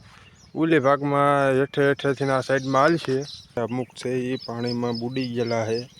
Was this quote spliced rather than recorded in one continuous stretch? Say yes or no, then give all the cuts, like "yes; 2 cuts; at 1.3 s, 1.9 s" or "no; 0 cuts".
yes; 1 cut; at 3.6 s